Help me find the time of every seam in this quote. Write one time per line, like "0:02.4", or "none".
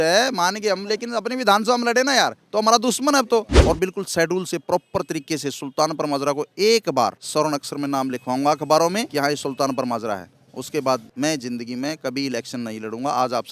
0:03.5
0:07.2
0:09.1
0:11.1

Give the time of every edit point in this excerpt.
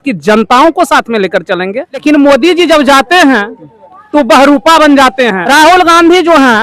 0:02.0
0:05.4

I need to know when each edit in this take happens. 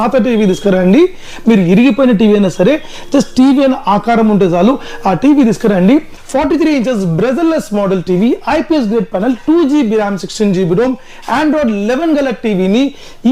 0:06.2

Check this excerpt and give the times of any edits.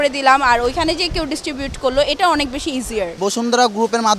0:03.1

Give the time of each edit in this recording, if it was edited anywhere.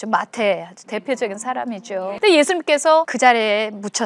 0:02.2
0:03.1

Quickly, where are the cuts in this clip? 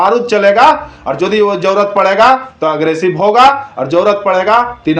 none

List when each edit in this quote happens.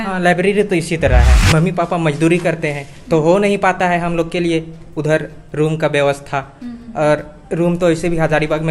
0:01.4

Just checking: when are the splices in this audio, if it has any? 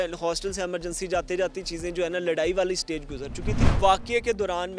0:03.7

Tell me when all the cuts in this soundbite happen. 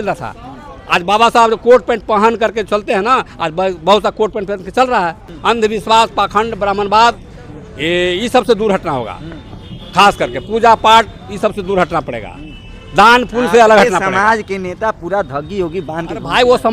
0:05.3

